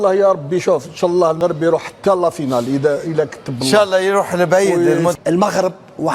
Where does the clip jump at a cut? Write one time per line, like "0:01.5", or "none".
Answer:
0:01.4
0:05.2